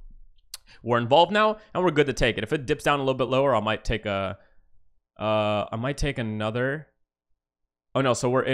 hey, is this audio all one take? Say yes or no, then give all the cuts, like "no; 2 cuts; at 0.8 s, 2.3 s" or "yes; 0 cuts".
yes; 0 cuts